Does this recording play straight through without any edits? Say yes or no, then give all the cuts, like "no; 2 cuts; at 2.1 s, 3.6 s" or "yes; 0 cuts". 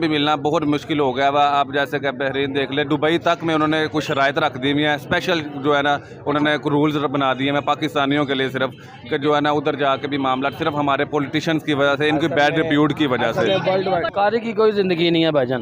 no; 1 cut; at 14.1 s